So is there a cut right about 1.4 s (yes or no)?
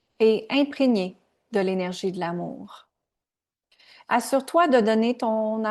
no